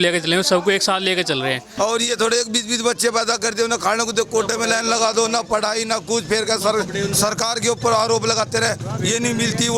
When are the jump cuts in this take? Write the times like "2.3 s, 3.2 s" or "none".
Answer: 1.6 s